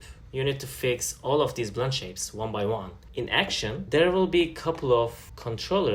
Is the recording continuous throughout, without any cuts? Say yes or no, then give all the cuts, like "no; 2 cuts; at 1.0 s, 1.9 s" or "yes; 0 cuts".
no; 1 cut; at 3.4 s